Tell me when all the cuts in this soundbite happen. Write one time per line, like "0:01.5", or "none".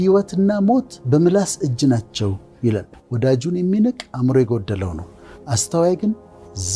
0:02.9